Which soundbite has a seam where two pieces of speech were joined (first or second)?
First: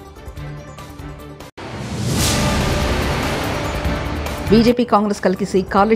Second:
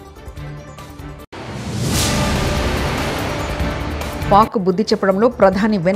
second